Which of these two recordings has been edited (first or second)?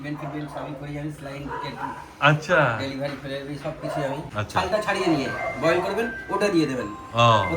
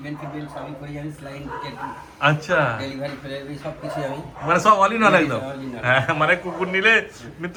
first